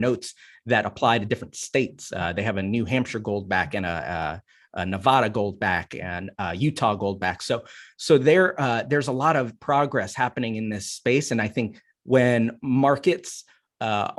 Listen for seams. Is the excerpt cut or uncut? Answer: uncut